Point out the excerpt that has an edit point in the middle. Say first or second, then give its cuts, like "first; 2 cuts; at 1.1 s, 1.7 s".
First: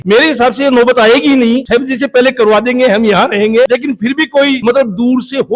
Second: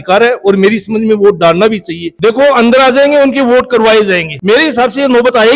second; 1 cut; at 2.1 s